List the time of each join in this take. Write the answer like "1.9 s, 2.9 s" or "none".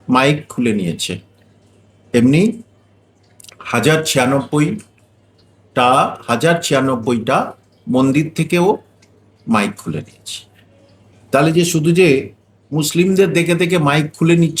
none